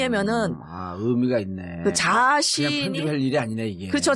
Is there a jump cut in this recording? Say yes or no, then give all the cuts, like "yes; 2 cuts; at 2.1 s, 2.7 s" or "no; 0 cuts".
yes; 1 cut; at 2.0 s